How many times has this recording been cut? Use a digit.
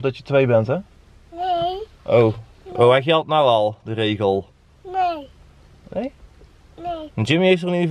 0